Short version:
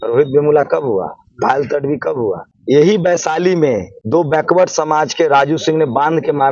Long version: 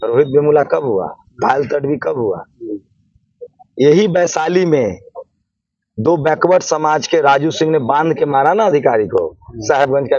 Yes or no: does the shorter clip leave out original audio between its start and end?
yes